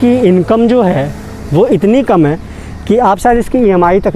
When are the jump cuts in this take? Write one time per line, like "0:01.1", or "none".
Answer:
none